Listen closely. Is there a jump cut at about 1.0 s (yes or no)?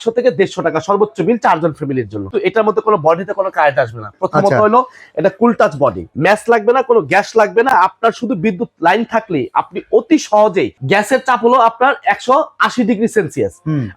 no